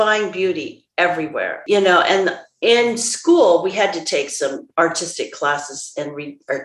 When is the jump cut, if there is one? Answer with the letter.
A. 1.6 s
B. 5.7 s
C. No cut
A